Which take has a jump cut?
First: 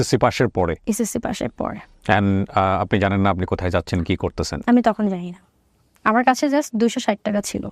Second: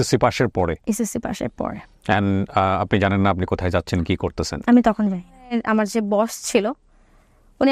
second; 1 cut; at 5.6 s

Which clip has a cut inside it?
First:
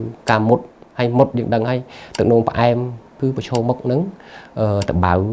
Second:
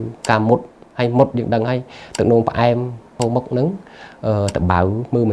second; 1 cut; at 3.1 s

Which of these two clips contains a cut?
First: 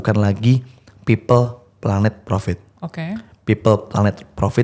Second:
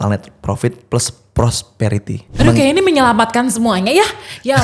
second; 1 cut; at 2.3 s

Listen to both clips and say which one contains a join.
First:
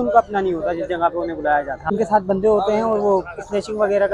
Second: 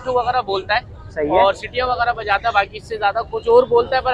first; 1 cut; at 1.9 s

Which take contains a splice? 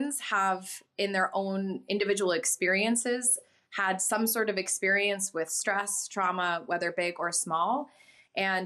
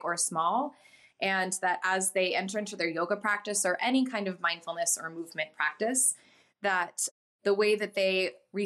second; 1 cut; at 7.1 s

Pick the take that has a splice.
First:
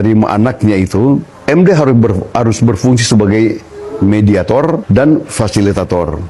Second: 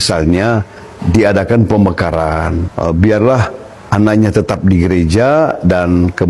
second; 1 cut; at 2.7 s

